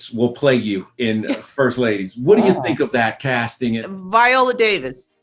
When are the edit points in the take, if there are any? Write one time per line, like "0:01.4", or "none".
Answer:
0:03.8

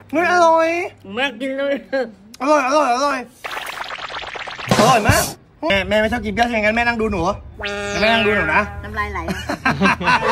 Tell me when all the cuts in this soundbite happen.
0:05.7

